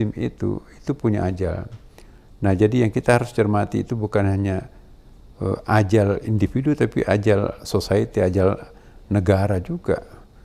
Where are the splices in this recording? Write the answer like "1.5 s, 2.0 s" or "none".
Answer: none